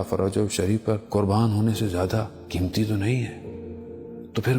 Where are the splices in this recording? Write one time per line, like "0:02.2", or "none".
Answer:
0:01.0
0:02.3